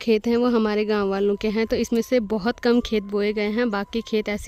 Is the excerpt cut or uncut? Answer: uncut